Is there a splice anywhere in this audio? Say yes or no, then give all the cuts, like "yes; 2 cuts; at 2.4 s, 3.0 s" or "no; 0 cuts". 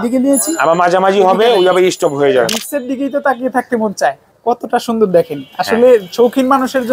yes; 2 cuts; at 2.5 s, 4.3 s